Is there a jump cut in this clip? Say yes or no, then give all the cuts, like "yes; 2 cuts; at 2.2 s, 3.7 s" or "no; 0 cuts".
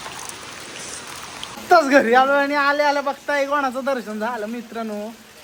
no; 0 cuts